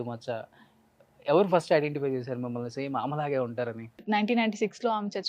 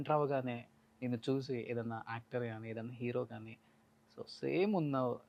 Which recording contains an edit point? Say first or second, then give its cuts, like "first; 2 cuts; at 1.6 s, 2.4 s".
first; 1 cut; at 4.0 s